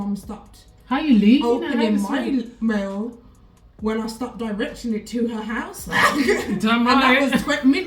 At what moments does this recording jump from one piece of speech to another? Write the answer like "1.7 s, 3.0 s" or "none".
none